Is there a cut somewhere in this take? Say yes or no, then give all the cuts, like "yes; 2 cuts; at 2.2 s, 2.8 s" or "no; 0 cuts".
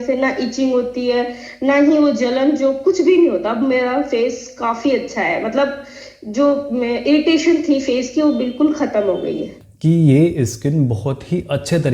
yes; 1 cut; at 9.5 s